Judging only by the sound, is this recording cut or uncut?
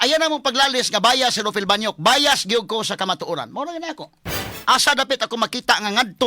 cut